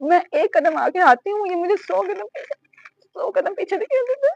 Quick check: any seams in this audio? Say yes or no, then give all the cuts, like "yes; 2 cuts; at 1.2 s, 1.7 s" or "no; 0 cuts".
no; 0 cuts